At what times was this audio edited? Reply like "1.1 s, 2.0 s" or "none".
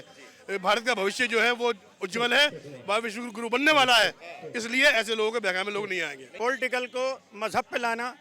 6.2 s